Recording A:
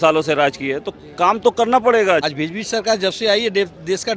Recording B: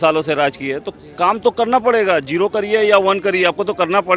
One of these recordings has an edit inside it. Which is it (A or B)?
A